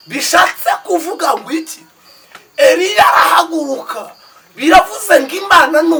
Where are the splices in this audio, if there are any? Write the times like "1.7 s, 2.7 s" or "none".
none